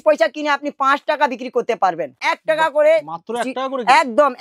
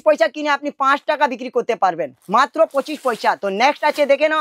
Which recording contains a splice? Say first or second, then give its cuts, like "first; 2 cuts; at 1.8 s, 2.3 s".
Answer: first; 1 cut; at 2.2 s